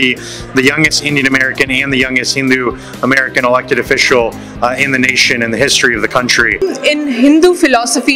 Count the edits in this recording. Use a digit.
1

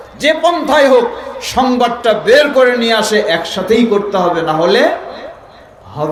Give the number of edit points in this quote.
0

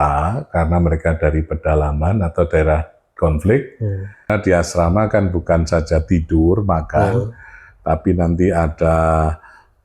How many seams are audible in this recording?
1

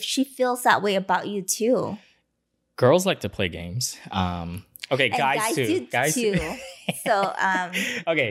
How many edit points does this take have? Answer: 0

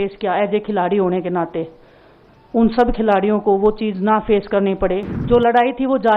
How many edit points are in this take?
1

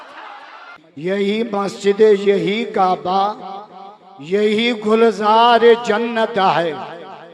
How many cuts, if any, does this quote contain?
1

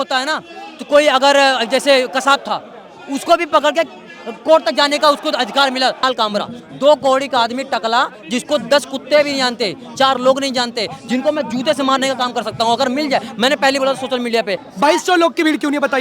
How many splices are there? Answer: 2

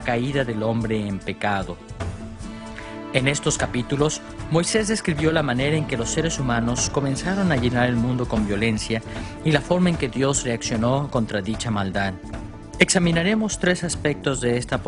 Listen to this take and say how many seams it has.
1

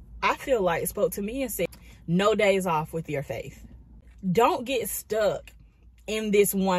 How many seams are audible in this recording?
2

